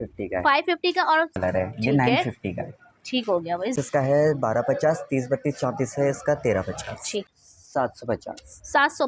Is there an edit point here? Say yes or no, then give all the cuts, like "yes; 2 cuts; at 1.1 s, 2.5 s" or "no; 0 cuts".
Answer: yes; 3 cuts; at 1.3 s, 3.7 s, 7.3 s